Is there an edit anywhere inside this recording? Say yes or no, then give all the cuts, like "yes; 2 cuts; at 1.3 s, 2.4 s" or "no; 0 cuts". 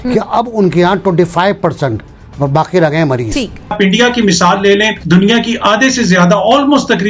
yes; 2 cuts; at 3.7 s, 5.0 s